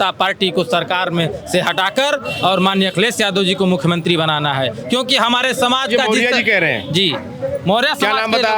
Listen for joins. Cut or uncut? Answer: uncut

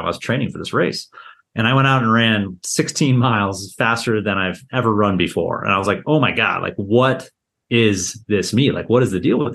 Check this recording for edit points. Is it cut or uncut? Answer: uncut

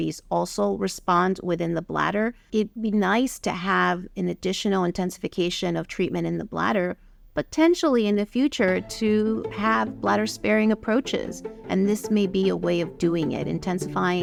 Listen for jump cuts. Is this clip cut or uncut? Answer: uncut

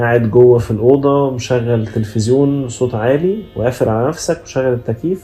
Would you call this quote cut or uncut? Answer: uncut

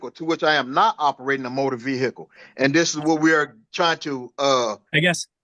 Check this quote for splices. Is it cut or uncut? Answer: uncut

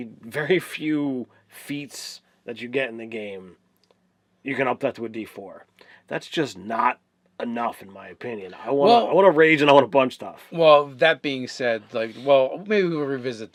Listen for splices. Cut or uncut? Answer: uncut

